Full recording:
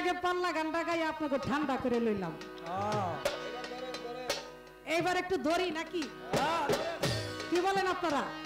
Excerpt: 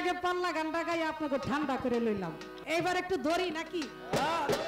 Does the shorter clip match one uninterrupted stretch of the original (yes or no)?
no